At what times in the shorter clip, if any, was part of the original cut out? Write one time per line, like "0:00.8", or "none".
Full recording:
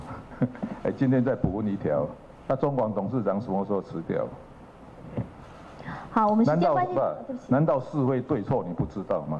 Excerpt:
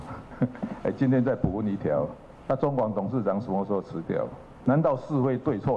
0:04.5